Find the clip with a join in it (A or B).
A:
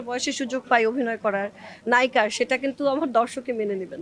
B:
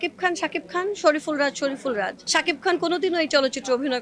B